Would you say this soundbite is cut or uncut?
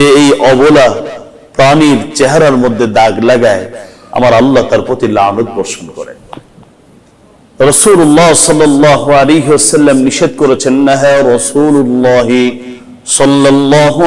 cut